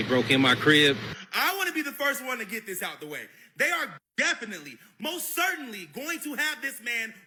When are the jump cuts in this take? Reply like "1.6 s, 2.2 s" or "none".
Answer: none